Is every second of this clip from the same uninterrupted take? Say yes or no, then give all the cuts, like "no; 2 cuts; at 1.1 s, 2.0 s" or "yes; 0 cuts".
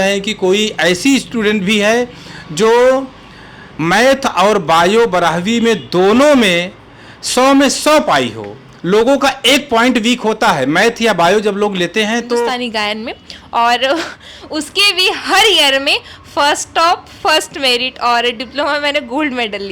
no; 1 cut; at 12.5 s